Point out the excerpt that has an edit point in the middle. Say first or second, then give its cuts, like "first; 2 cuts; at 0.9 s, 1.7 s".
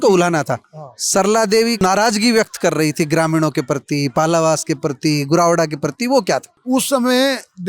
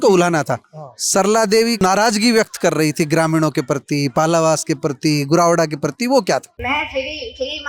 second; 1 cut; at 6.5 s